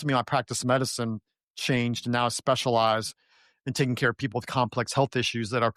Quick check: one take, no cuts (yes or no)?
yes